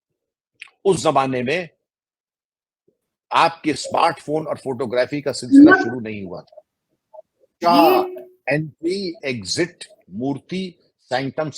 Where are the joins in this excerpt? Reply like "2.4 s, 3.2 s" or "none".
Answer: 7.5 s

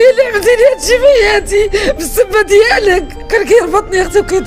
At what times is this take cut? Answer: 3.1 s

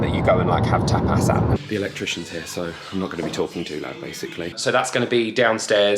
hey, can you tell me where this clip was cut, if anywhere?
1.6 s, 4.5 s

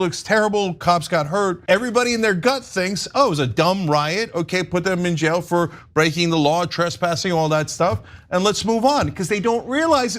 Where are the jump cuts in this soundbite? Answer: 1.7 s

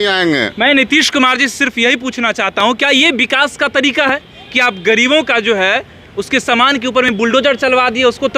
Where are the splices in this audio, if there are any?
none

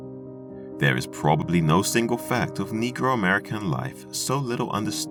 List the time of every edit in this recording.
none

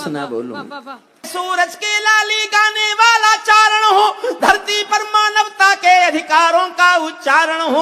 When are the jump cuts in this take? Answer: 1.3 s

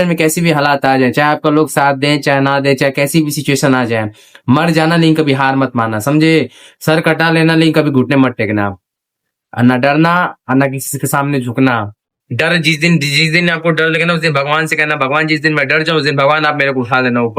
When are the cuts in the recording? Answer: none

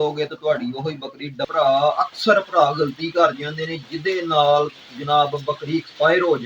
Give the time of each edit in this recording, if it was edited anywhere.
1.5 s

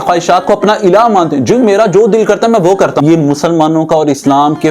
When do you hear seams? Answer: 3.0 s

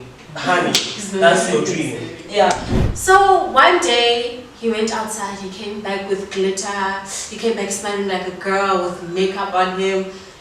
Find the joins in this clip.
2.7 s

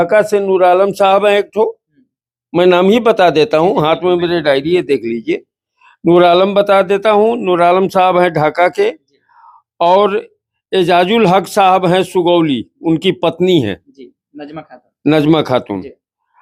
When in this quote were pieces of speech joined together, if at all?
none

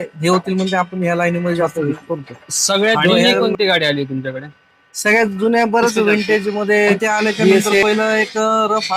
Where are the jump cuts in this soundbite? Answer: 1.7 s, 7.8 s

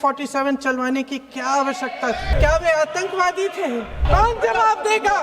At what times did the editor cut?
2.3 s, 4.0 s

